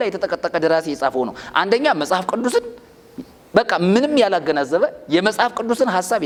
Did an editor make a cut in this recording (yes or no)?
no